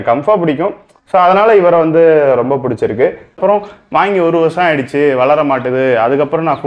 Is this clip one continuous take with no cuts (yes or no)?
no